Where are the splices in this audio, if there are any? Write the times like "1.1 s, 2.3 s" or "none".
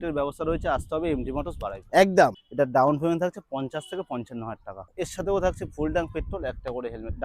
2.4 s, 4.9 s